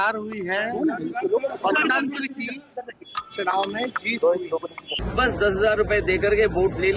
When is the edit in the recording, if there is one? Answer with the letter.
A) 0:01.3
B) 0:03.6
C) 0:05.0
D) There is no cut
C